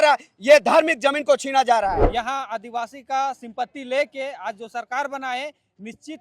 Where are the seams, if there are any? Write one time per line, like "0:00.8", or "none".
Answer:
0:02.0